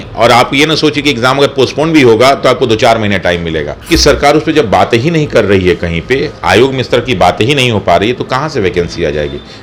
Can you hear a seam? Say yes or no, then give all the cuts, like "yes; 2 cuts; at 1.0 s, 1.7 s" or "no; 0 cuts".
yes; 1 cut; at 3.8 s